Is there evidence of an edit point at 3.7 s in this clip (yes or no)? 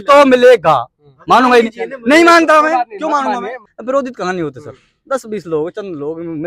yes